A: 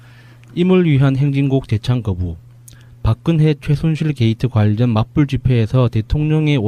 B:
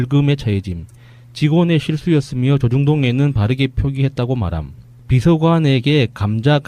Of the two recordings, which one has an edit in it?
A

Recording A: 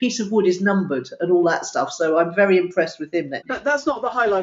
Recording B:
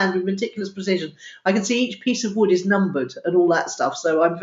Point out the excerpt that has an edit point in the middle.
A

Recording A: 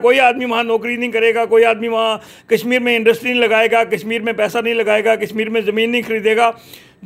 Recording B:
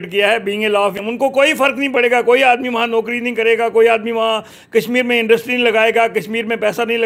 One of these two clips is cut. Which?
B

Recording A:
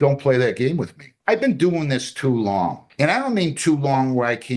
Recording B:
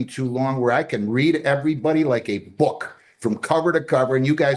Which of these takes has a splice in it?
A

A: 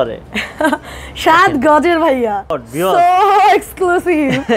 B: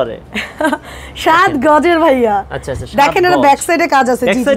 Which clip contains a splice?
A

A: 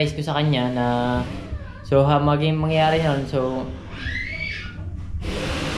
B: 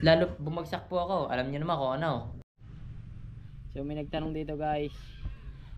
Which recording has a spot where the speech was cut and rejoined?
B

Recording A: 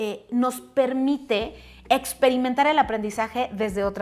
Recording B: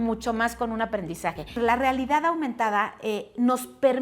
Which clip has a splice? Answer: B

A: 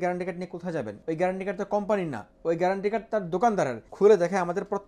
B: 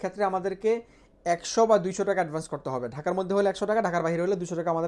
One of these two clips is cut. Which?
A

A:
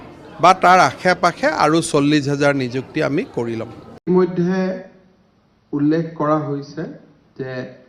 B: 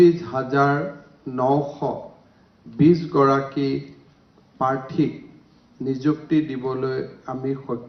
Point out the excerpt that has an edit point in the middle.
A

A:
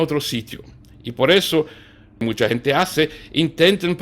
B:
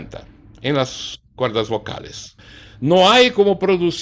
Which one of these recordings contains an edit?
A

